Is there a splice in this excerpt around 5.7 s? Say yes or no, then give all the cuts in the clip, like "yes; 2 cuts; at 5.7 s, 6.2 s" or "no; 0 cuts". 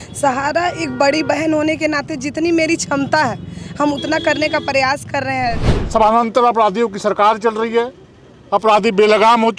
yes; 1 cut; at 5.7 s